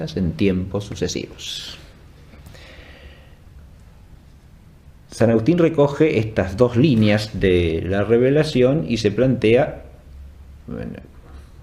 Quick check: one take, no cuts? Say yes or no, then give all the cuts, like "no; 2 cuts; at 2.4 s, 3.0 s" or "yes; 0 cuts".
no; 1 cut; at 10.7 s